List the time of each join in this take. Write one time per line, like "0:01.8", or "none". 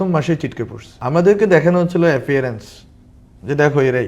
0:01.0